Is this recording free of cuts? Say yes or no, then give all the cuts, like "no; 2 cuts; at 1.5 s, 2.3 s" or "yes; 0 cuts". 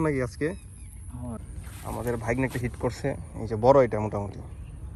no; 1 cut; at 1.4 s